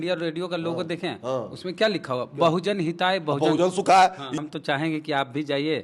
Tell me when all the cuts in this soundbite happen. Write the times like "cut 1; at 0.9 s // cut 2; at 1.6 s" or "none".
cut 1; at 4.2 s